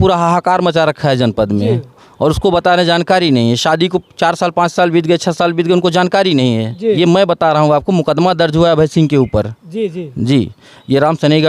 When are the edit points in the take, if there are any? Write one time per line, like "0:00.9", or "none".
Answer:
0:06.7